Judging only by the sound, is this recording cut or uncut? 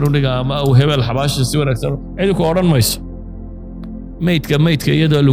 cut